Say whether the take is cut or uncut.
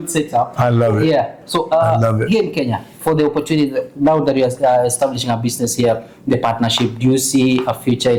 uncut